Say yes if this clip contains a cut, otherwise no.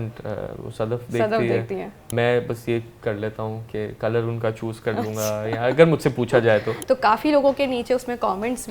yes